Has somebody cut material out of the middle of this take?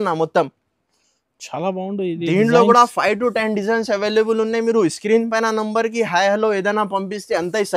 no; 0 cuts

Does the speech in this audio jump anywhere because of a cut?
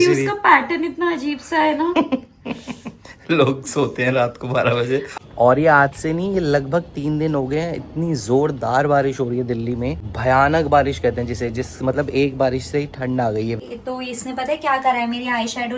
yes; 3 cuts; at 5.1 s, 10.1 s, 13.5 s

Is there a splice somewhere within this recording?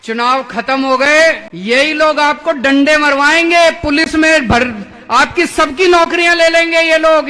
yes; 1 cut; at 1.5 s

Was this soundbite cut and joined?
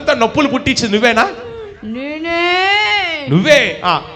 no; 0 cuts

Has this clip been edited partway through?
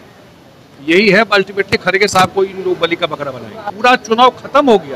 yes; 1 cut; at 3.7 s

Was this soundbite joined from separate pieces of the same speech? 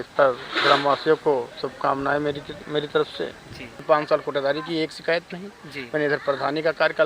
yes; 1 cut; at 3.8 s

